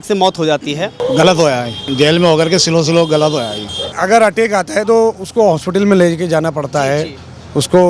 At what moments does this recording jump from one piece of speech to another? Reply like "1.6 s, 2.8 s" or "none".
1.0 s, 1.9 s, 3.9 s